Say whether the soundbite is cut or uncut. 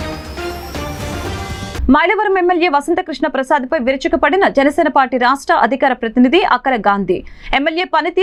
uncut